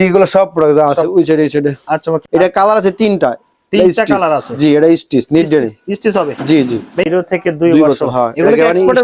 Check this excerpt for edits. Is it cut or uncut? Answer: cut